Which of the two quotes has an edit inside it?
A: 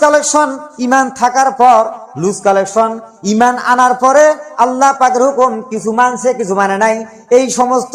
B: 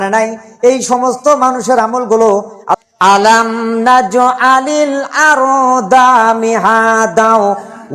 B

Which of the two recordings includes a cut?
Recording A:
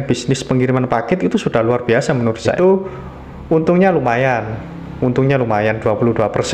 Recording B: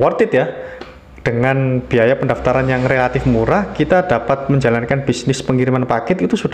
A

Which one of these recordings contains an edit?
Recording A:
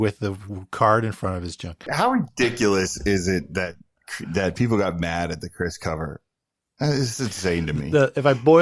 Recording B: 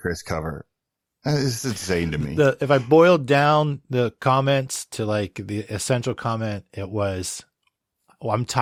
A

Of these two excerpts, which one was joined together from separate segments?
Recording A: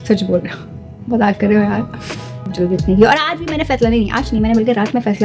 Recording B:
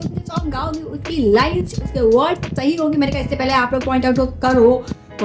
A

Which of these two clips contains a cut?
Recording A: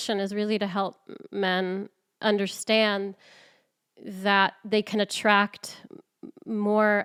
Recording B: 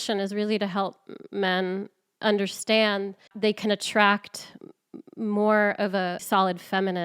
B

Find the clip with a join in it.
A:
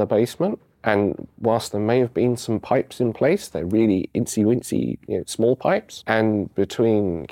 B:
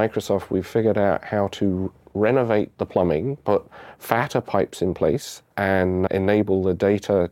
B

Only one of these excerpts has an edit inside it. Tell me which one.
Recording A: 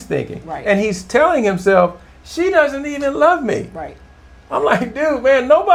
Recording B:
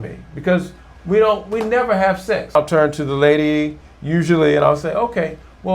B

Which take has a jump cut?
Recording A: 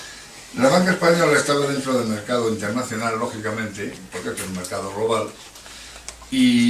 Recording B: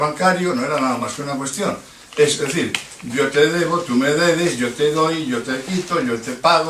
A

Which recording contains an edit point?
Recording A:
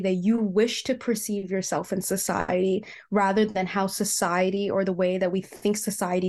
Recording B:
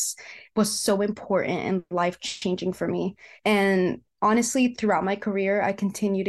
B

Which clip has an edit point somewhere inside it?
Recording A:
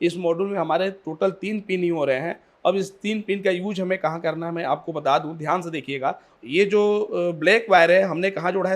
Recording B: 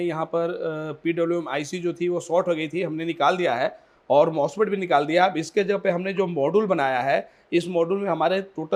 A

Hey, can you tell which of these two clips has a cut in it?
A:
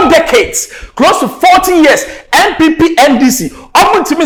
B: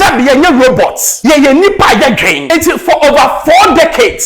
B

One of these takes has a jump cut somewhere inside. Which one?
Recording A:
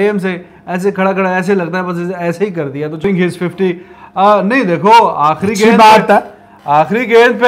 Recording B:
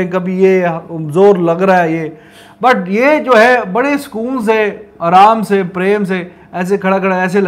A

